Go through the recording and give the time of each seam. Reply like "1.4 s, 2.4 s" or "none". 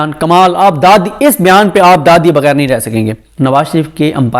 3.2 s